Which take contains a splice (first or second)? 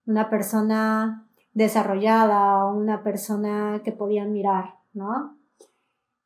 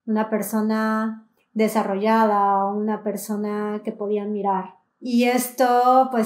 second